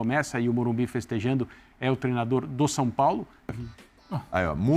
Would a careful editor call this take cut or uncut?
cut